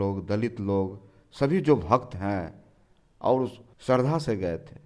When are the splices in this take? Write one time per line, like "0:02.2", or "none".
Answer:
0:03.7